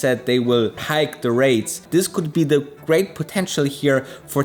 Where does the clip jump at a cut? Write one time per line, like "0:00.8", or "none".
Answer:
0:01.8